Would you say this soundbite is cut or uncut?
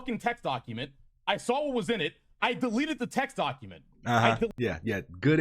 uncut